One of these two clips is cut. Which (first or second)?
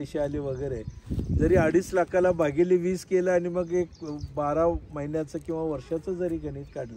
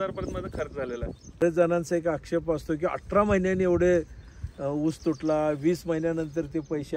second